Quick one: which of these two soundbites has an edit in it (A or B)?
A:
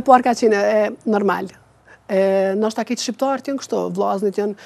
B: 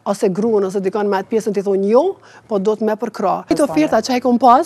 B